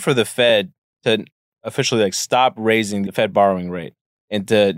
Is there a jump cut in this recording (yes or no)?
yes